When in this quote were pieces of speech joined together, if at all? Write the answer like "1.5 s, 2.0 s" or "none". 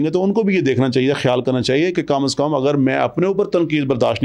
none